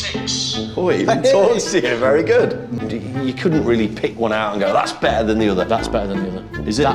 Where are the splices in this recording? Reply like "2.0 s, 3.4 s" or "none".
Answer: 2.5 s